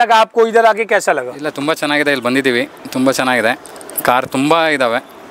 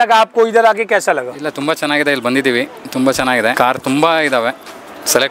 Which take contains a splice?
second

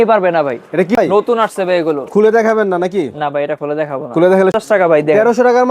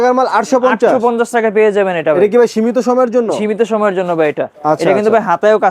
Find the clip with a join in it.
first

